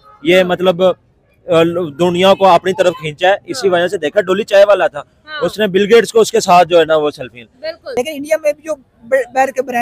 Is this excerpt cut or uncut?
cut